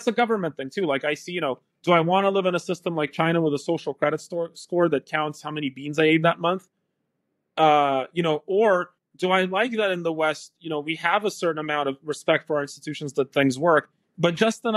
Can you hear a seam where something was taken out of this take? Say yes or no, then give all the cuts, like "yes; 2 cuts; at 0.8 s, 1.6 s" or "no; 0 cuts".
no; 0 cuts